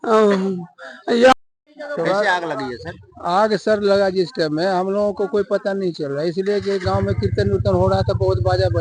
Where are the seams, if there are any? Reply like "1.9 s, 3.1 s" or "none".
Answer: 1.3 s